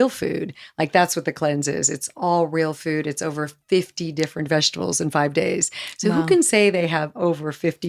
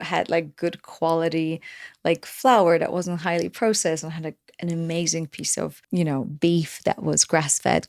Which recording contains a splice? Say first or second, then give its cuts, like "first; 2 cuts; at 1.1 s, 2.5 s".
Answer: second; 1 cut; at 5.8 s